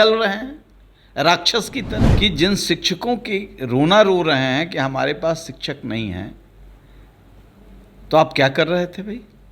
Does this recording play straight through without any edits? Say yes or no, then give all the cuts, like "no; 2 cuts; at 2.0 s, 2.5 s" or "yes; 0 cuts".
no; 1 cut; at 2.1 s